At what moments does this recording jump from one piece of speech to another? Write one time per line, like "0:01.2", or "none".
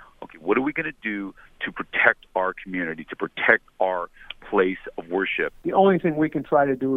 0:05.6